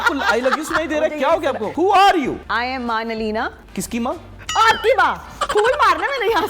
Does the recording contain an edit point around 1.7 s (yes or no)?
yes